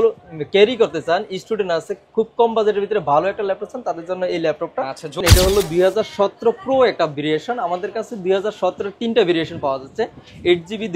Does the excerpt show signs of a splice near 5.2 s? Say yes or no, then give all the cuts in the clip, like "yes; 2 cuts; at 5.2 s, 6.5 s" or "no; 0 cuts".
yes; 1 cut; at 5.2 s